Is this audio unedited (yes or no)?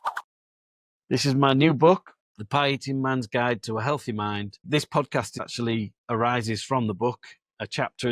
no